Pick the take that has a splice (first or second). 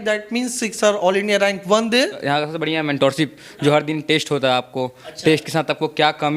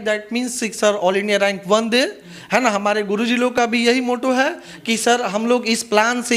first